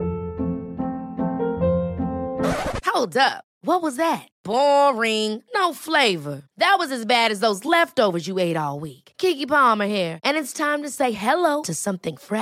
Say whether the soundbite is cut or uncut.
uncut